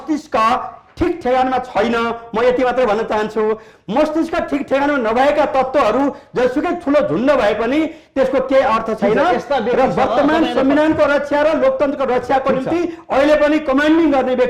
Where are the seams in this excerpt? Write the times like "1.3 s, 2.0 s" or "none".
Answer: none